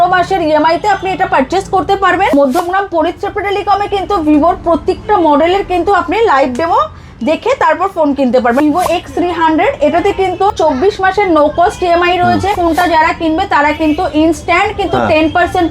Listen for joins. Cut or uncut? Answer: cut